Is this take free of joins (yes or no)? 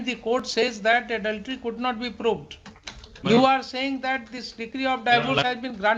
yes